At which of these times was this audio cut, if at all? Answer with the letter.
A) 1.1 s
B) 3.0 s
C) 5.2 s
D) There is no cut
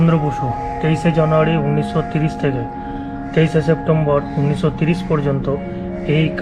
D